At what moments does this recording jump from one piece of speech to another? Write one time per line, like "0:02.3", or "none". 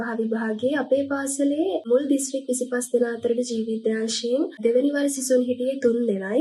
none